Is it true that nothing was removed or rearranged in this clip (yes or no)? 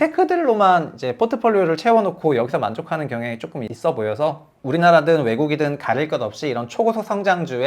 no